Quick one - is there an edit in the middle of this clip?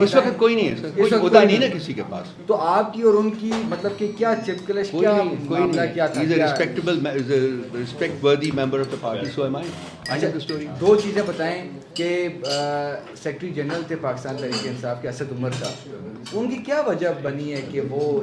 no; 0 cuts

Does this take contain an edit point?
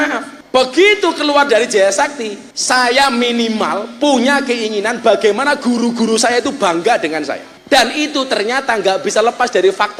no; 0 cuts

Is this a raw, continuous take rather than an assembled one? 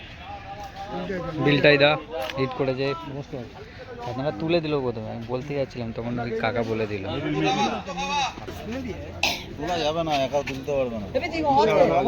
no; 1 cut; at 8.4 s

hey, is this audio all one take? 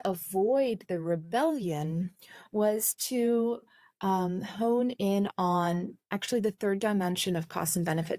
yes; 0 cuts

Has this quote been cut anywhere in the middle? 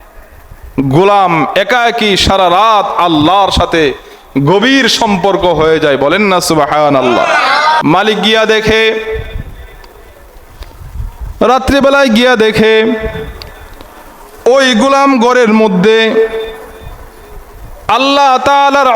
yes; 1 cut; at 7.8 s

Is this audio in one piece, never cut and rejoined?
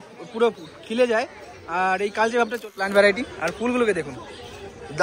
no; 1 cut; at 2.8 s

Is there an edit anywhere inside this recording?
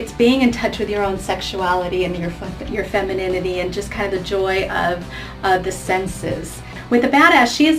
yes; 1 cut; at 6.7 s

